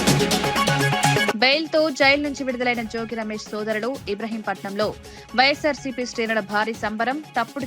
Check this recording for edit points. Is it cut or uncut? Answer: cut